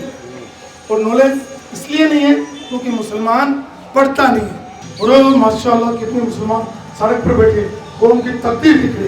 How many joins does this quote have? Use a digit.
1